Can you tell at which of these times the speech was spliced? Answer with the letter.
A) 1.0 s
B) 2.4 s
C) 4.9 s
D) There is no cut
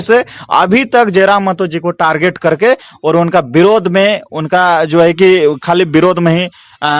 D